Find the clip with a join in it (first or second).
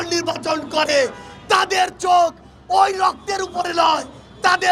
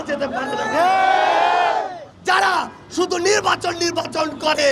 second